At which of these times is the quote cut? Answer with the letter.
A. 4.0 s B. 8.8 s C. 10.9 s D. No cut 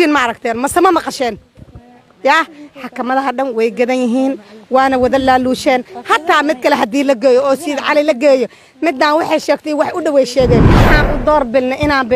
C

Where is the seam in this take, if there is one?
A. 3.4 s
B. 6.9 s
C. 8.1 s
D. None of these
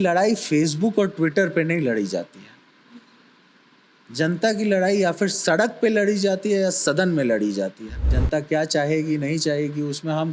C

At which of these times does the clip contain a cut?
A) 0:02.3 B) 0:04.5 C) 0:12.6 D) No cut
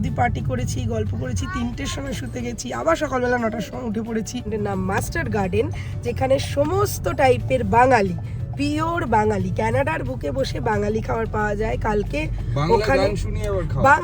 B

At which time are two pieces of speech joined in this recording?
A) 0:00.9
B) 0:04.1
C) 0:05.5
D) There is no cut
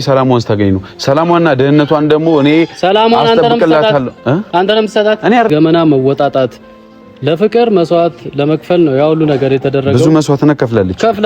C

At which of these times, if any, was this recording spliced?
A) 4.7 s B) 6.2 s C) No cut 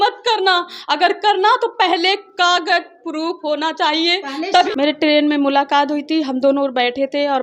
A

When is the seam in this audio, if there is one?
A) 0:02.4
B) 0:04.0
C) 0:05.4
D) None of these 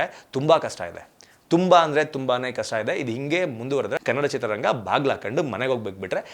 B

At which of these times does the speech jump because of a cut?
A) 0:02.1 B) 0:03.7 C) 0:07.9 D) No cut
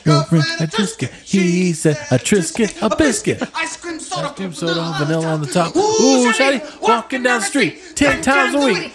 B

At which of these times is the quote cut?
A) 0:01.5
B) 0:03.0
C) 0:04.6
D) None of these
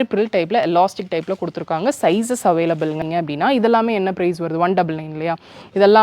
B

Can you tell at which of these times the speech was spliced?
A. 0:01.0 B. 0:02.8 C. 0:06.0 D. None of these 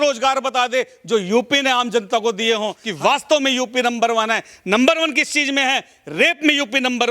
B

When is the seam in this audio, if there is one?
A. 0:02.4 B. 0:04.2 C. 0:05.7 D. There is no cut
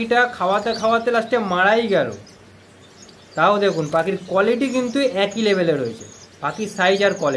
D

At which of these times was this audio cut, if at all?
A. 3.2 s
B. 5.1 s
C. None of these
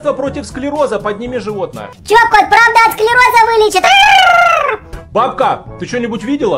C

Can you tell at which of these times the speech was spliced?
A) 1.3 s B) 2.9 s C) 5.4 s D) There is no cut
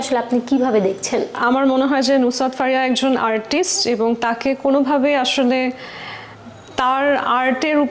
A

